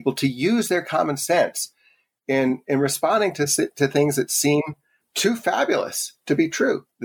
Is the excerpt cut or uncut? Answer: cut